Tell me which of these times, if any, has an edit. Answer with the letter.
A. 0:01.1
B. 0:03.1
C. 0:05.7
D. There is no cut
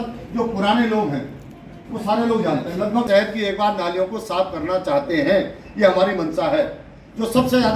B